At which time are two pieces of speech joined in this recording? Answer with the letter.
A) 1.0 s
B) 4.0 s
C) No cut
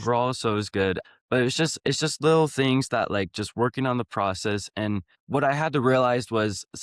A